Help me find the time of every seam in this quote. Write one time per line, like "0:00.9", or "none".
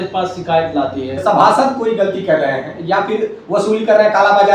0:01.2